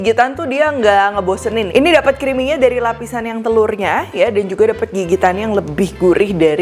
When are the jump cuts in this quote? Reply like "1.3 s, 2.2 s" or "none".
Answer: 1.7 s